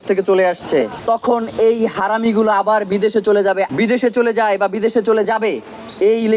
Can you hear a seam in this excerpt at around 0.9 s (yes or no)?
yes